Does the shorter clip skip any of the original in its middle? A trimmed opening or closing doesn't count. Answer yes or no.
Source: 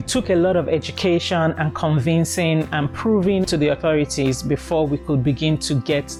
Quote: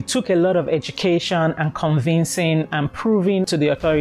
no